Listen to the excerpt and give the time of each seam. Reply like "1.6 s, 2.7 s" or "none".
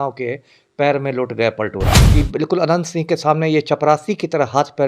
2.0 s